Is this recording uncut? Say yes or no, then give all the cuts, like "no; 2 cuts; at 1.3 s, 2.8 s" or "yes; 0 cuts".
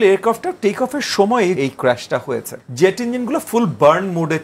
no; 2 cuts; at 1.6 s, 2.6 s